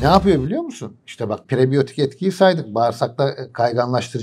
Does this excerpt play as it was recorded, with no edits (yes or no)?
no